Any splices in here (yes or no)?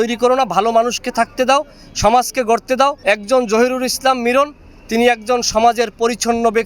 yes